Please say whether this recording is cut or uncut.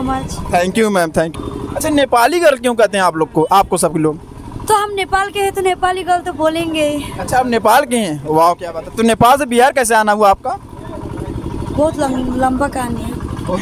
cut